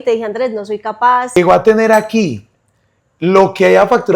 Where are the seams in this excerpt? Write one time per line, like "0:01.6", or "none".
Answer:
0:01.4